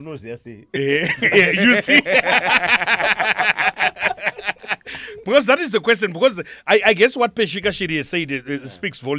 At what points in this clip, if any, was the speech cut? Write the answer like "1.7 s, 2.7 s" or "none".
none